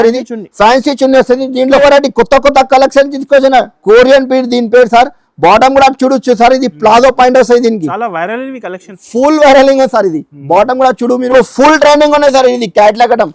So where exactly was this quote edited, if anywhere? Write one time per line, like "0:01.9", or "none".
0:01.8
0:11.3